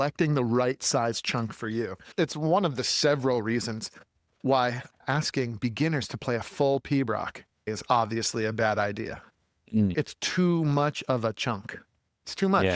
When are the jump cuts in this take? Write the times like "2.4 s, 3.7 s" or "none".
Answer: 2.0 s, 7.8 s